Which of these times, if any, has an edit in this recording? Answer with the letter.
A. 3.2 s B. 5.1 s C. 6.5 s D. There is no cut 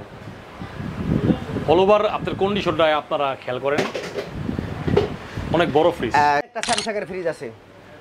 C